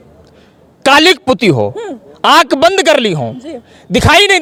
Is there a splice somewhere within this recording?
no; 0 cuts

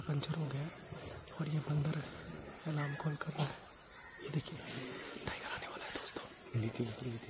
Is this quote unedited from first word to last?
yes; 0 cuts

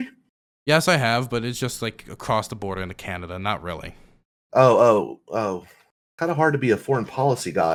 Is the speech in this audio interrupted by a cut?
no; 0 cuts

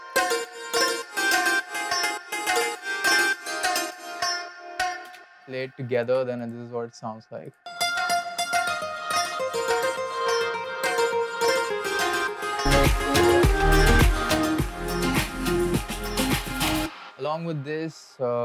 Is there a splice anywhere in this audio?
yes; 1 cut; at 17.1 s

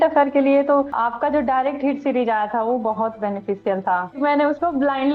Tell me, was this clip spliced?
yes; 2 cuts; at 0.9 s, 4.2 s

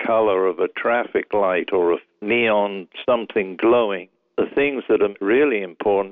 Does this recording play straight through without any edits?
no; 3 cuts; at 2.1 s, 4.1 s, 5.2 s

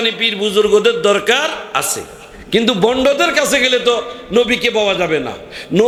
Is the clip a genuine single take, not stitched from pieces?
yes; 0 cuts

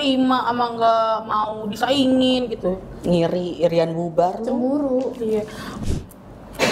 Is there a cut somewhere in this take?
yes; 1 cut; at 5.7 s

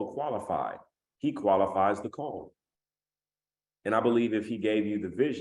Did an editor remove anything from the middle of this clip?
no; 0 cuts

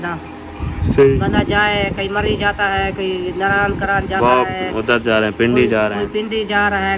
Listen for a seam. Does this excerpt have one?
no; 0 cuts

